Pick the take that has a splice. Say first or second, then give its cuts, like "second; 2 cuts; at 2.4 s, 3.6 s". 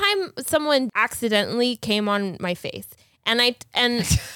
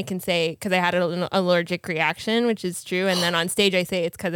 first; 1 cut; at 0.9 s